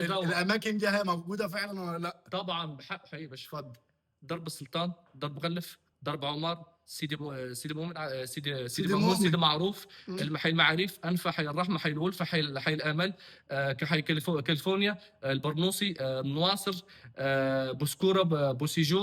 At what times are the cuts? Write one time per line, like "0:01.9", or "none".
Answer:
none